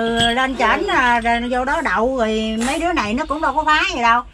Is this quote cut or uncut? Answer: uncut